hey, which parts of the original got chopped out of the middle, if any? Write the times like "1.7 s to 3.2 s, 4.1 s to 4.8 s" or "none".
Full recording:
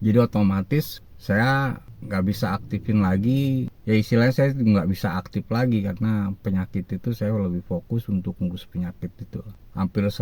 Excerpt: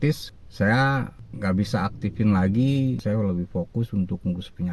3.7 s to 7.2 s